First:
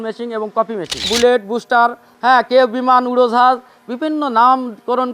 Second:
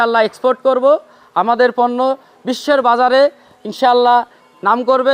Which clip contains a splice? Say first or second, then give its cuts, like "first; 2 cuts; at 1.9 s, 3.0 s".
first; 1 cut; at 1.1 s